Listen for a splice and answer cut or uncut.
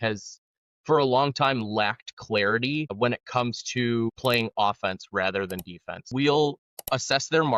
cut